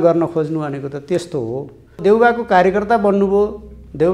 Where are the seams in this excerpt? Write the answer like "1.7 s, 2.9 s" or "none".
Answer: 2.0 s